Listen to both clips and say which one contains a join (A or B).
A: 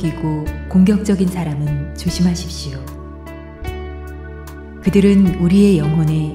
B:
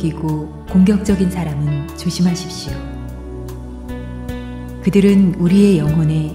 B